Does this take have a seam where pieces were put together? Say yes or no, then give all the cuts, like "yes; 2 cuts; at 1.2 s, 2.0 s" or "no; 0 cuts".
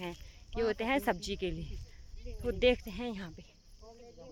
no; 0 cuts